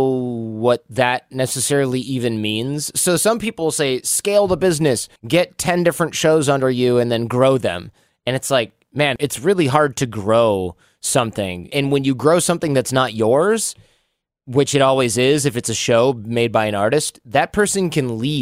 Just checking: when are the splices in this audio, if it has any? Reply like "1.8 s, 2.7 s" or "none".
5.1 s, 9.2 s, 11.7 s